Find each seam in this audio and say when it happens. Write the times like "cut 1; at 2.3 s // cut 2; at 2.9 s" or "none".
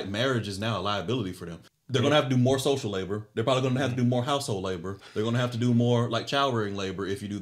cut 1; at 1.6 s